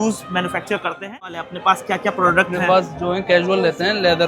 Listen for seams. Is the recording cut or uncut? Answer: cut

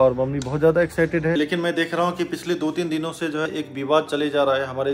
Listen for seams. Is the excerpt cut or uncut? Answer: cut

